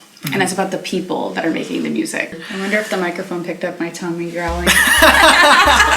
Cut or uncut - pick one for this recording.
cut